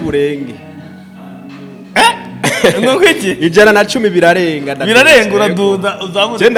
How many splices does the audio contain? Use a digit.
0